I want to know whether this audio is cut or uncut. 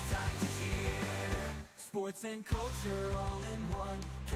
uncut